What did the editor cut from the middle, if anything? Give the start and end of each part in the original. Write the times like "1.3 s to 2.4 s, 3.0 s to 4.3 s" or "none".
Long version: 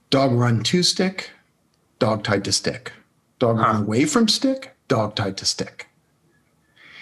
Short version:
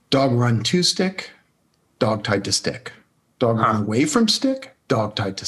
none